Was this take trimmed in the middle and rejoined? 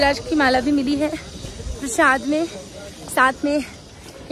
no; 0 cuts

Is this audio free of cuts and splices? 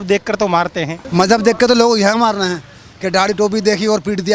no; 1 cut; at 0.9 s

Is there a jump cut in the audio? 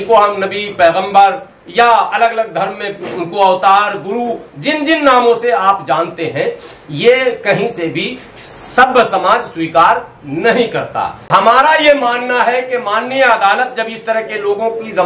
yes; 1 cut; at 11.2 s

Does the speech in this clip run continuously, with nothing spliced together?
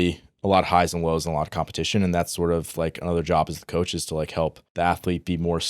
no; 1 cut; at 4.6 s

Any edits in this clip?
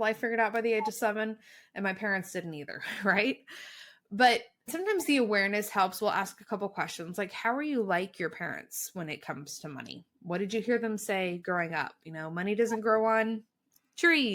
no; 0 cuts

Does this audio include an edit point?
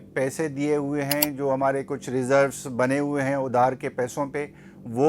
no; 0 cuts

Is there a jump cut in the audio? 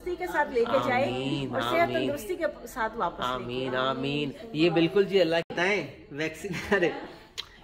no; 0 cuts

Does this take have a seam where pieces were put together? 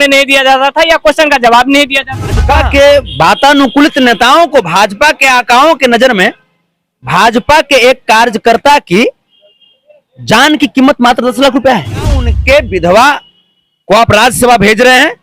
yes; 2 cuts; at 2.6 s, 12.3 s

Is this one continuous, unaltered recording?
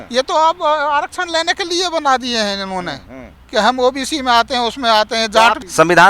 yes; 0 cuts

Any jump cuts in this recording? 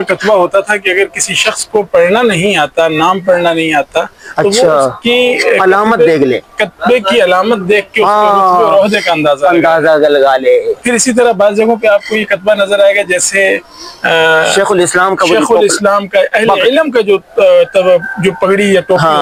no; 0 cuts

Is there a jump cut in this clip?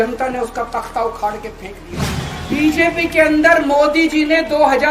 yes; 1 cut; at 2.3 s

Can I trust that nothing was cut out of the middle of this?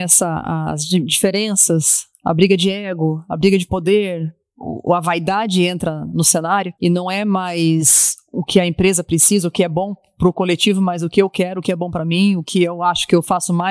no; 1 cut; at 6.7 s

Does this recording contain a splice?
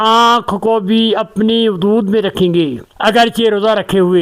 no; 0 cuts

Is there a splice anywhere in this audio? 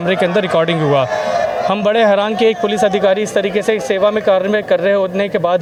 no; 0 cuts

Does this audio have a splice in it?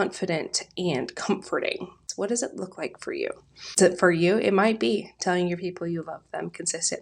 yes; 2 cuts; at 2.0 s, 3.8 s

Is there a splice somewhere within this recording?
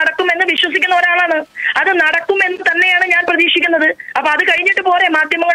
no; 0 cuts

